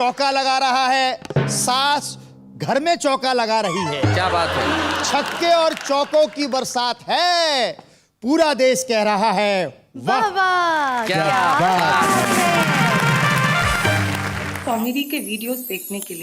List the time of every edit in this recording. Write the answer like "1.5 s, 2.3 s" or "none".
14.5 s